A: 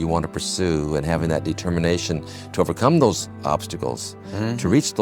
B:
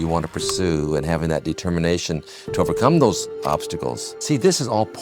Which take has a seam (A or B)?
B